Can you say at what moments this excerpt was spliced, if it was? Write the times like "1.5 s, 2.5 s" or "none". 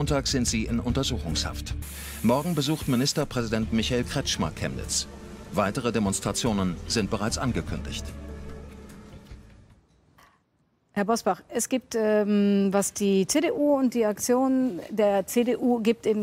none